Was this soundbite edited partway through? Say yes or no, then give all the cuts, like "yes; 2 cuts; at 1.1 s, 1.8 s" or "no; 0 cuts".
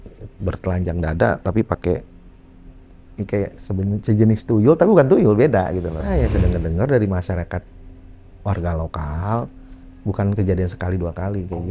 yes; 1 cut; at 6.1 s